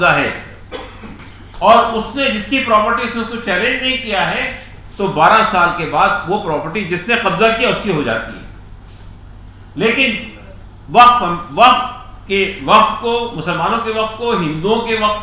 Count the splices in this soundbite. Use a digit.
0